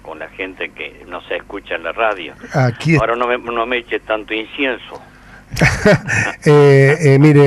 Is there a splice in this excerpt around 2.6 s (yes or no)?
no